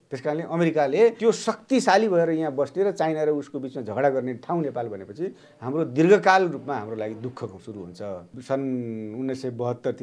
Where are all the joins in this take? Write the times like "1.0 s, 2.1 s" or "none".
1.2 s, 8.3 s